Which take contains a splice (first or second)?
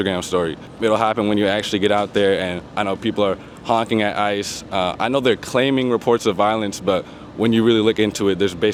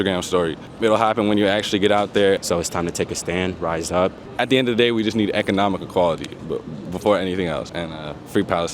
second